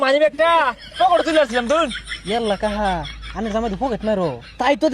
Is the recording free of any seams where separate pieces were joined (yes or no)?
no